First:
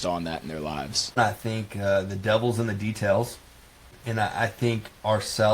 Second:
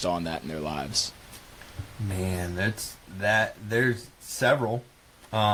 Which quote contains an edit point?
first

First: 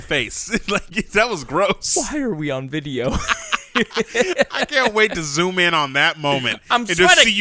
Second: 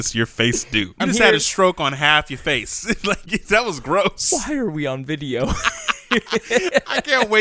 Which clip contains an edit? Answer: second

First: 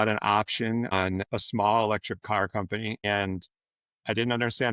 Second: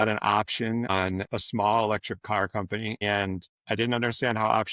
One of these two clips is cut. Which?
second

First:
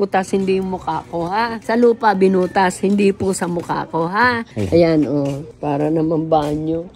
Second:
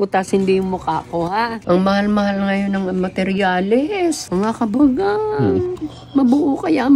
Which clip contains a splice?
second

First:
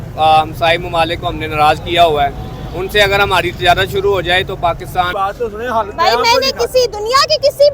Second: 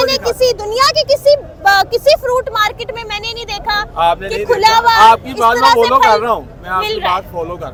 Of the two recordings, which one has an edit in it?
first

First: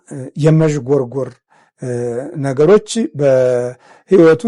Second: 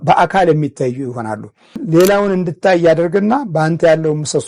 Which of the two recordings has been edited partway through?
second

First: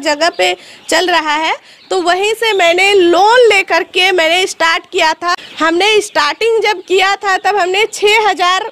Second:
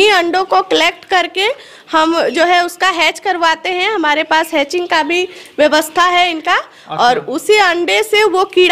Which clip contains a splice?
first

